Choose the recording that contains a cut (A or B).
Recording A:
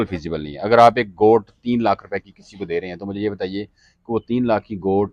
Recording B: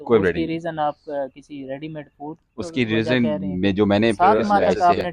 B